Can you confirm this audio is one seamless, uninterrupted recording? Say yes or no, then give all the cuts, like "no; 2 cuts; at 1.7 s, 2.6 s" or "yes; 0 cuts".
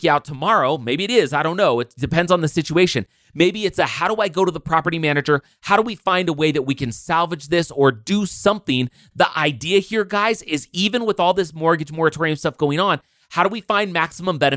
yes; 0 cuts